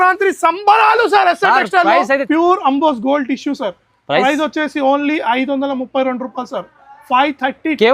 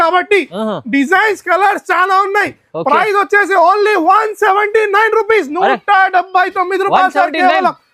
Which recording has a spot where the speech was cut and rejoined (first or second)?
first